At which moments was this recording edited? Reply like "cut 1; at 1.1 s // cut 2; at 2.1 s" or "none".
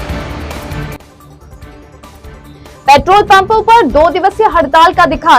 none